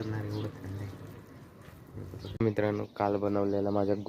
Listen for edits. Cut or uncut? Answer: cut